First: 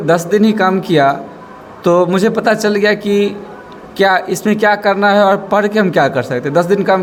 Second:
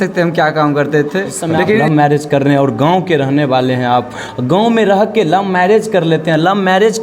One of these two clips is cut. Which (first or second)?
second